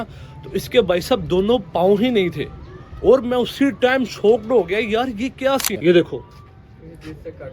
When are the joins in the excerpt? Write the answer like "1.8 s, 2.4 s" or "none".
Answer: 5.8 s